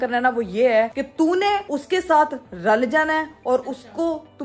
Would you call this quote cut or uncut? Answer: uncut